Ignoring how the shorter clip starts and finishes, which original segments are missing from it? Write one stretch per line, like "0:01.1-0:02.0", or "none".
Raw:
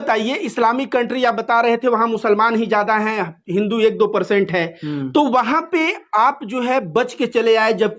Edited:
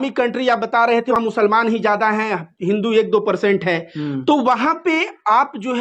0:01.9-0:02.0

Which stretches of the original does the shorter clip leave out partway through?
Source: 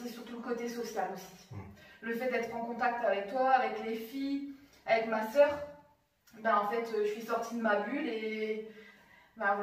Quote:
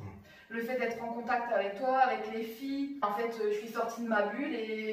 0:04.6-0:06.6

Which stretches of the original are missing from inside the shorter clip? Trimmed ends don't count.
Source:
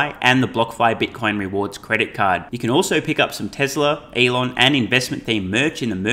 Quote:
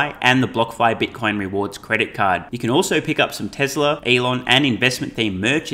0:04.0-0:04.1

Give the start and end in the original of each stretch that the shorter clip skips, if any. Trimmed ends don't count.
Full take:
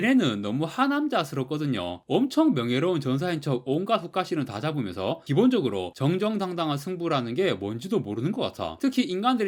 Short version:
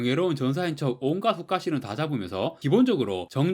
none

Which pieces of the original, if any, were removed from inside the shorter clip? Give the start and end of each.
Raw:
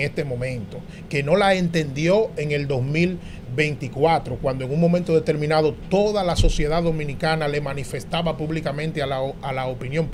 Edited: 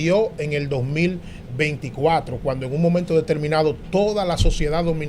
none

